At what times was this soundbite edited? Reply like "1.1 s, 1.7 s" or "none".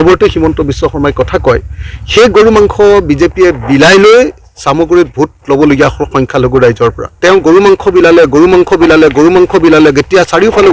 7.1 s